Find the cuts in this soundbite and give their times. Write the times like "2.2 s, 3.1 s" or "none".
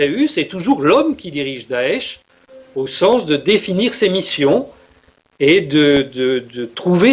none